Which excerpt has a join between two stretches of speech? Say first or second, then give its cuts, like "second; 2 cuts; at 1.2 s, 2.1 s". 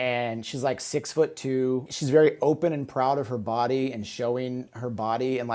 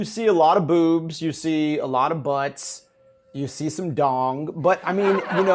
first; 1 cut; at 1.9 s